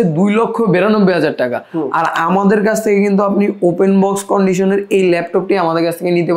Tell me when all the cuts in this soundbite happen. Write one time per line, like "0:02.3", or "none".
none